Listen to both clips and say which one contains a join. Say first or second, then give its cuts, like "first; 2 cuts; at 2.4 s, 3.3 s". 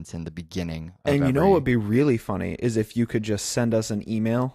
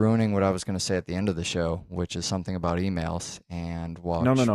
first; 1 cut; at 2.8 s